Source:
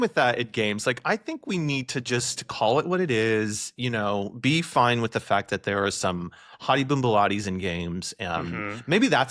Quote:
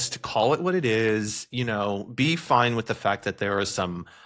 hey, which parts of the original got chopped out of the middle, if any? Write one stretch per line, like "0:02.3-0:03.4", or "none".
none